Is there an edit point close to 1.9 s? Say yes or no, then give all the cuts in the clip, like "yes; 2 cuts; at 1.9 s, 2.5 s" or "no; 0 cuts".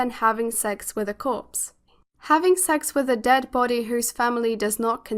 yes; 1 cut; at 1.9 s